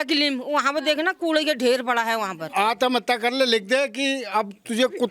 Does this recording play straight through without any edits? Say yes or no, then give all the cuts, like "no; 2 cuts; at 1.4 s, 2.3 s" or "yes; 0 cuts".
no; 1 cut; at 2.4 s